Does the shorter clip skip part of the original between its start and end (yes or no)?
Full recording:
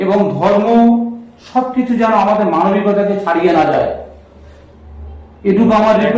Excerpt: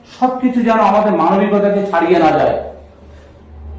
no